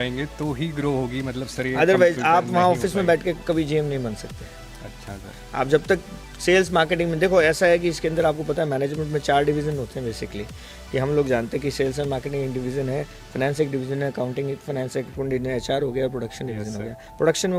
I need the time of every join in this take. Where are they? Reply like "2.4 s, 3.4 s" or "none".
none